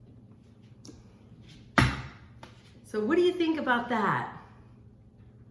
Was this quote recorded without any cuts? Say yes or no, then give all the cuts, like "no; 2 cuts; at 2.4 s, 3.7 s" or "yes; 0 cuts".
yes; 0 cuts